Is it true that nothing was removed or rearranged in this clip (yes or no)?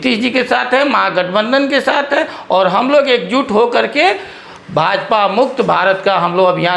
yes